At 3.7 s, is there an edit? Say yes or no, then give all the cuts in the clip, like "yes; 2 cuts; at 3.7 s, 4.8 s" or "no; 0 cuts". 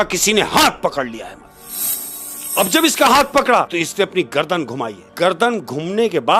yes; 2 cuts; at 3.7 s, 5.0 s